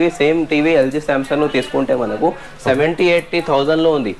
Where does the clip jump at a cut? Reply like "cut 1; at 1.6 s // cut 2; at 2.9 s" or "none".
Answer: none